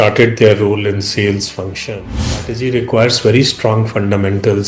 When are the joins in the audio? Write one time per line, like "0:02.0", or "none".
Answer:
0:02.2